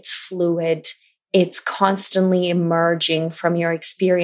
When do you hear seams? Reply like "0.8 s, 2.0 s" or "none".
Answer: none